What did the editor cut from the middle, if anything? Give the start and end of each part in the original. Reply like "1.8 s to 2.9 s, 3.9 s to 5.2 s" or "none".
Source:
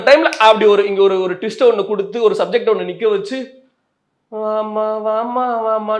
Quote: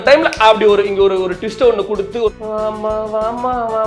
2.3 s to 4.2 s